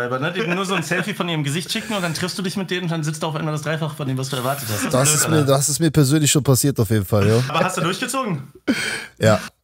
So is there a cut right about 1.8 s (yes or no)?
no